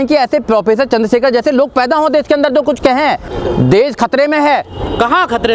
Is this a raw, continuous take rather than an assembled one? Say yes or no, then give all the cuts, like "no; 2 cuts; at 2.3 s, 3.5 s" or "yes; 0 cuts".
no; 1 cut; at 3.3 s